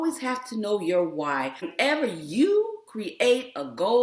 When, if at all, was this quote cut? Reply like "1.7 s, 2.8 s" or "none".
1.7 s